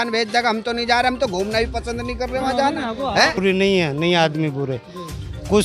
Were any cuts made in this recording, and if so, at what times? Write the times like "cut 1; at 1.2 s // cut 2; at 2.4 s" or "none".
cut 1; at 3.4 s